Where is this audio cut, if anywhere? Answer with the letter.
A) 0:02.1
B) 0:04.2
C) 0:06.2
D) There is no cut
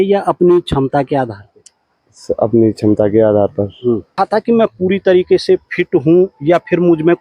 B